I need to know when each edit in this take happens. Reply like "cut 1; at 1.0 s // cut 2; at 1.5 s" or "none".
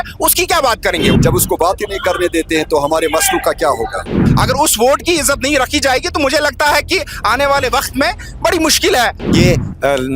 cut 1; at 1.2 s // cut 2; at 4.2 s // cut 3; at 9.2 s